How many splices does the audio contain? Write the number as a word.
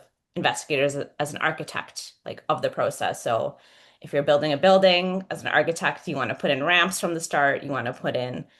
zero